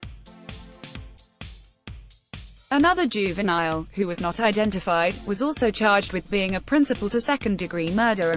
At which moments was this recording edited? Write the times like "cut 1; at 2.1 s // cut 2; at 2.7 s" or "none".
none